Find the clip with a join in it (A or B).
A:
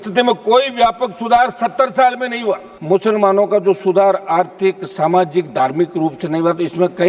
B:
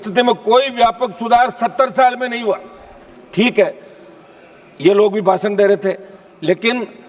A